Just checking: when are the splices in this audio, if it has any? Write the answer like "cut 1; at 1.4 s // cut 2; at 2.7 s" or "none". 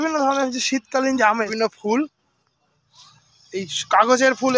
cut 1; at 1.5 s